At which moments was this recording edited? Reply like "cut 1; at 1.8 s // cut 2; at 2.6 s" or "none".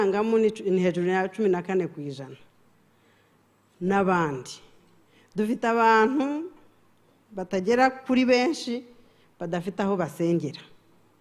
none